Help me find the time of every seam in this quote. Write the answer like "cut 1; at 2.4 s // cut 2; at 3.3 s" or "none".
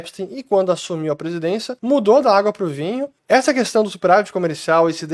cut 1; at 1.7 s // cut 2; at 3.1 s